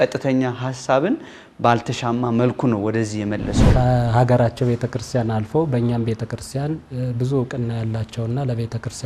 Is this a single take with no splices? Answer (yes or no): no